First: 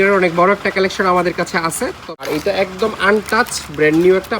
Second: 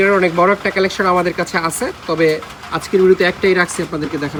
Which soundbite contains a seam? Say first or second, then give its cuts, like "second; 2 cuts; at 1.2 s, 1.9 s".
first; 1 cut; at 2.0 s